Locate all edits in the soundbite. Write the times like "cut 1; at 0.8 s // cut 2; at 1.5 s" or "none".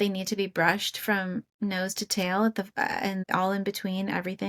none